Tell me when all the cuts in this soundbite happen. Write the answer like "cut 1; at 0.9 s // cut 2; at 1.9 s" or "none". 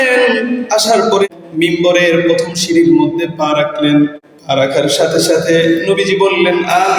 cut 1; at 1.3 s // cut 2; at 4.3 s